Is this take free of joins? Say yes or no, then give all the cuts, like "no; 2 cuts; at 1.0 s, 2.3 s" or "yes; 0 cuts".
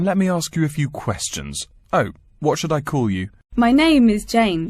no; 1 cut; at 3.4 s